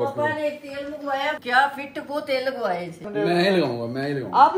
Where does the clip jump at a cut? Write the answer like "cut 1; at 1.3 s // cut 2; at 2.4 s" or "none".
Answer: cut 1; at 1.4 s // cut 2; at 3.1 s